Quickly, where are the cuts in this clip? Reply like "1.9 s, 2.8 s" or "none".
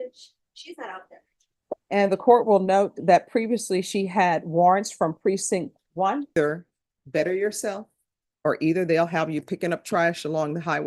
1.8 s, 6.3 s

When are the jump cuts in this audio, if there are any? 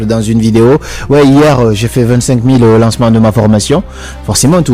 none

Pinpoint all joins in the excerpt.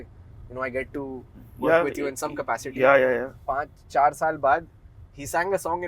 3.3 s

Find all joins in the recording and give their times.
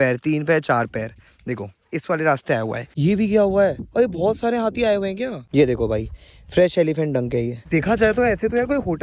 2.9 s, 5.4 s, 7.6 s

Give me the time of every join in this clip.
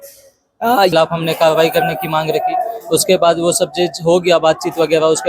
0.9 s

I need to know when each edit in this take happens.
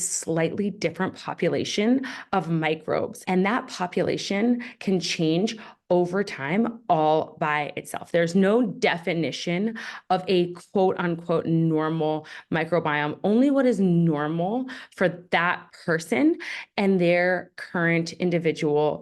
none

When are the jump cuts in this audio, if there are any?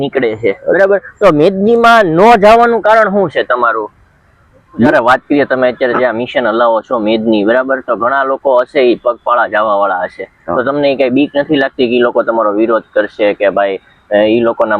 4.9 s

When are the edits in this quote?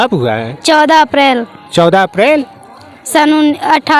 none

